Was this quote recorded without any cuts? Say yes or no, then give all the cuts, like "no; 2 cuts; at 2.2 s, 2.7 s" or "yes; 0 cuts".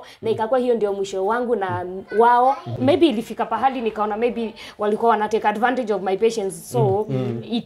no; 1 cut; at 2.7 s